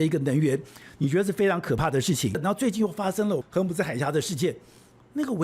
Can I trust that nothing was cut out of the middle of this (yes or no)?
no